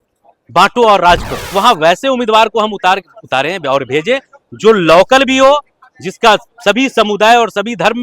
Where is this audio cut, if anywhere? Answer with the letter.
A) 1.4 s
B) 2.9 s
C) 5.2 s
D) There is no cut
A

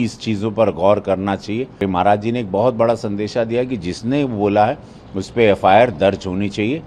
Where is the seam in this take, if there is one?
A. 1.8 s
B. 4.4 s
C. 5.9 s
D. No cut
A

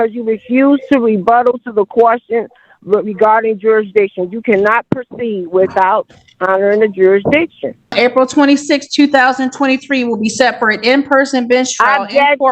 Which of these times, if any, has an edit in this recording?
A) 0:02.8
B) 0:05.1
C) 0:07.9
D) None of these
C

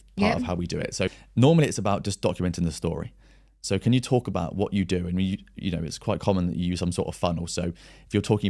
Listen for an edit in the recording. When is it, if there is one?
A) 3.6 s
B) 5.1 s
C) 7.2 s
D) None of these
D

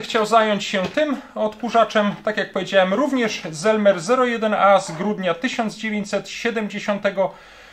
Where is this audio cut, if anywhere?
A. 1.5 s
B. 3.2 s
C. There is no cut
C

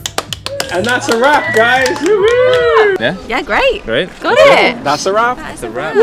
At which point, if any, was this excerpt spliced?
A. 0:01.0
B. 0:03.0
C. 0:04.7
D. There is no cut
B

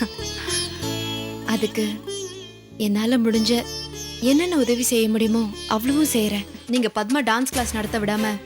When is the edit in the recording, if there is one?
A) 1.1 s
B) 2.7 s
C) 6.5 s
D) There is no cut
C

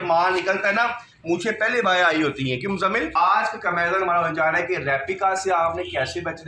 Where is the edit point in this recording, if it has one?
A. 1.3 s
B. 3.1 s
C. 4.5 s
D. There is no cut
B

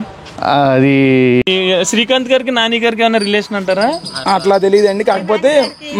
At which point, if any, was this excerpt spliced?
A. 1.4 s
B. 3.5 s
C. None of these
A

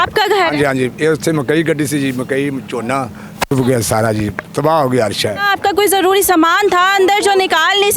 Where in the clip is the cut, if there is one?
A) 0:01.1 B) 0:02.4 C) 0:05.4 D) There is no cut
C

